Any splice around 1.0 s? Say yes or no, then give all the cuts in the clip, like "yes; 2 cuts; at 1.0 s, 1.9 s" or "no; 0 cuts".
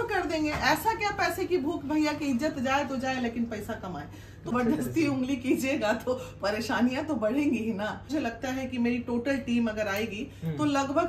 no; 2 cuts; at 4.5 s, 8.1 s